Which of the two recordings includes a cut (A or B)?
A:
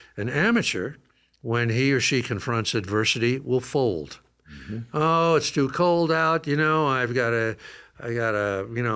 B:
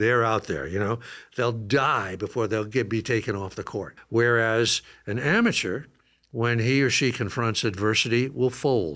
B